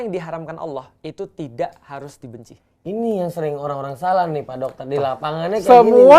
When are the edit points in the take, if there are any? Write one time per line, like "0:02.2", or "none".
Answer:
none

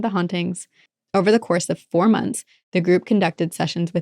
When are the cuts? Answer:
0:00.9

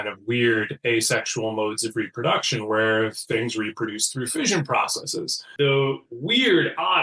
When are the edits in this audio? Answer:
0:05.5

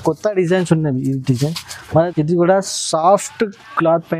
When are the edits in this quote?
0:01.7

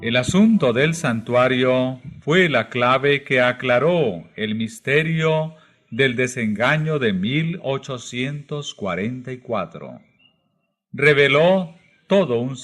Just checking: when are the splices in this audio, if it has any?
0:07.0

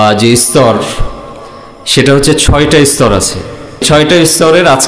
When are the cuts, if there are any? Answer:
0:03.8

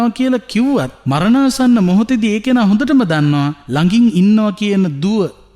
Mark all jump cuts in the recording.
0:01.0
0:03.6

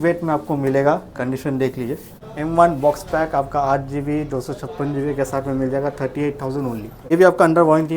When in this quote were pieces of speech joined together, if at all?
0:02.2
0:07.0

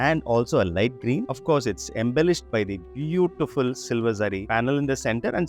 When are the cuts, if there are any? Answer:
0:01.3

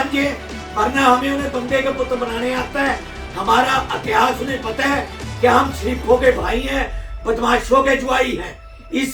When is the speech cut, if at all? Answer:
none

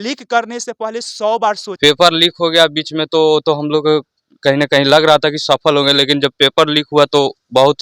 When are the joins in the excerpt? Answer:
0:01.7

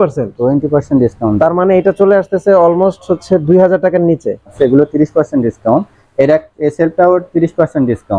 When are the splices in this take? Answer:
0:04.5

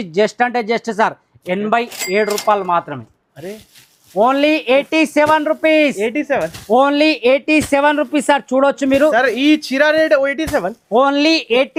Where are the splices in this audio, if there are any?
none

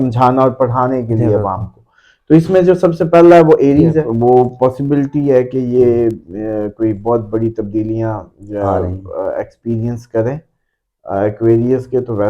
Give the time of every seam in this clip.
0:04.1

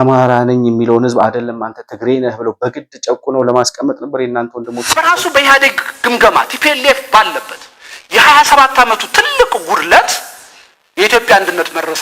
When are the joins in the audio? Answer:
0:04.9

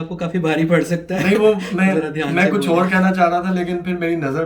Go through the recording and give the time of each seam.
0:01.1

